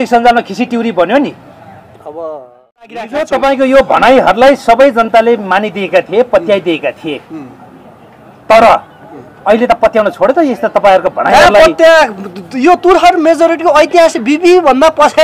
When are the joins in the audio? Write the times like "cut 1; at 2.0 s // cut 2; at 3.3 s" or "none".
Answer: cut 1; at 3.1 s